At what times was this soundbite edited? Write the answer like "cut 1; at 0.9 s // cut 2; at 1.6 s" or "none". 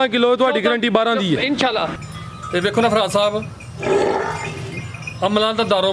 cut 1; at 2.0 s